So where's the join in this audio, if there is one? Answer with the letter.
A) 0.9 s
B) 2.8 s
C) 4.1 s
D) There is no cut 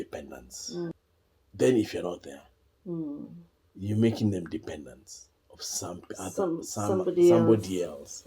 A